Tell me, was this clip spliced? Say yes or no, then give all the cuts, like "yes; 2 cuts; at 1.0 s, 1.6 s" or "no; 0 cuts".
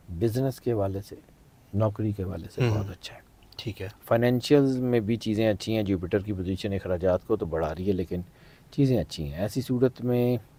no; 0 cuts